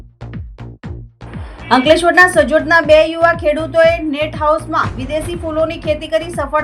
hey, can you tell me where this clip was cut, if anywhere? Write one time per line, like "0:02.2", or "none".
0:01.5